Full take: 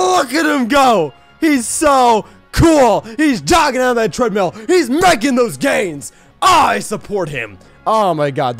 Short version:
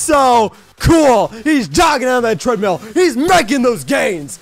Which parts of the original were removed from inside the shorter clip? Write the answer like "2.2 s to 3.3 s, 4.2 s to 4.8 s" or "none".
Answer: none